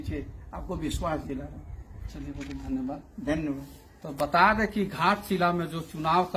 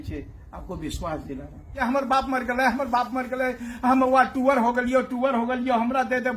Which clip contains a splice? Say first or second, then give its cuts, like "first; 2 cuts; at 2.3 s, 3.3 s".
second; 1 cut; at 1.8 s